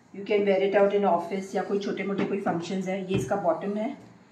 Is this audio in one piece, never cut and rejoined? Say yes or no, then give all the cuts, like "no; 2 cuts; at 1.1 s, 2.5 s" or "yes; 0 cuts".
yes; 0 cuts